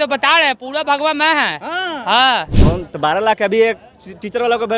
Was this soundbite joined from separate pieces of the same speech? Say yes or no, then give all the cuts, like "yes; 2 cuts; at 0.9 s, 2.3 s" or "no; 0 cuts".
yes; 1 cut; at 2.6 s